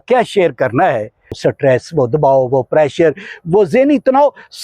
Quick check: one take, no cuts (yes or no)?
no